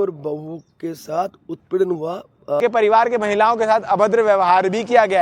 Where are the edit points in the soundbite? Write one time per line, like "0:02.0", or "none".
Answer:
0:02.6